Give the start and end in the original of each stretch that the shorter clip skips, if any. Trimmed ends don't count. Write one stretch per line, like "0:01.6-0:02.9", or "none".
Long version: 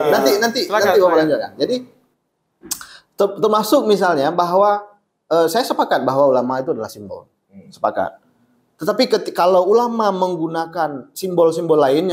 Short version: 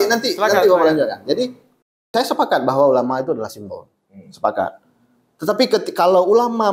0:02.4-0:05.5